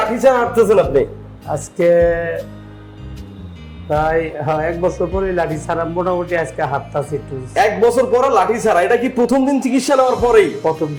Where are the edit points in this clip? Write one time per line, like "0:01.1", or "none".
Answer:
none